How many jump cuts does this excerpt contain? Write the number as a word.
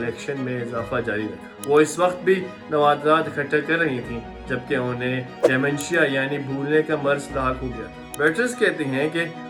zero